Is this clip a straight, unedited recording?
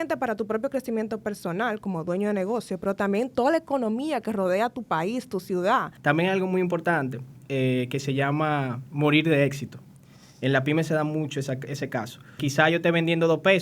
no; 2 cuts; at 5.9 s, 12.4 s

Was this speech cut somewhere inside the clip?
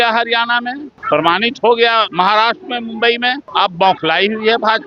yes; 3 cuts; at 0.9 s, 2.1 s, 3.4 s

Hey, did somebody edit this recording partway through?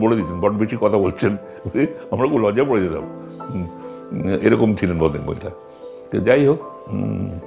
no; 0 cuts

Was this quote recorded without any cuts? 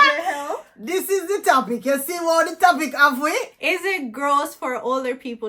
no; 1 cut; at 3.5 s

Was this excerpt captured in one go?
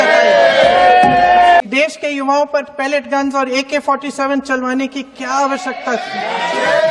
no; 1 cut; at 1.6 s

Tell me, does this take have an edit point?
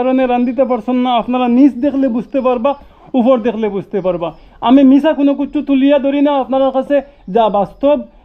no; 0 cuts

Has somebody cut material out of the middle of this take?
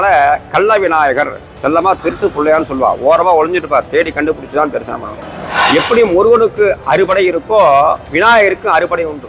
no; 0 cuts

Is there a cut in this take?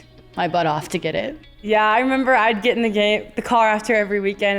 yes; 1 cut; at 1.7 s

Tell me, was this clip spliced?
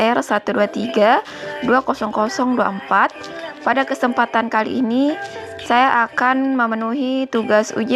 no; 0 cuts

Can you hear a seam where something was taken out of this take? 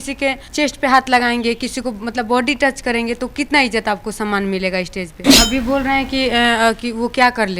yes; 1 cut; at 5.3 s

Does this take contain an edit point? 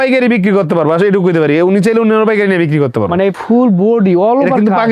yes; 1 cut; at 3.4 s

